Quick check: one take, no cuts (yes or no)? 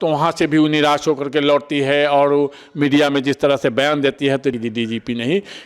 no